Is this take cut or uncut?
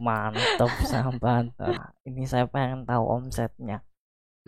cut